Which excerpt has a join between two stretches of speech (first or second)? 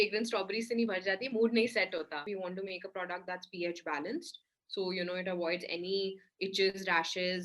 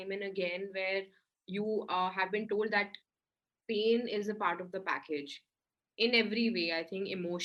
first